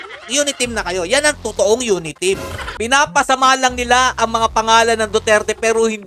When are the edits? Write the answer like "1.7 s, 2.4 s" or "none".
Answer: 2.7 s